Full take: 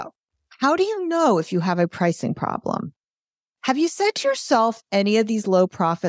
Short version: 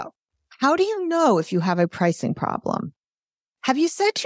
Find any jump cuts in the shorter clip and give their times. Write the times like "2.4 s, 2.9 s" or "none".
none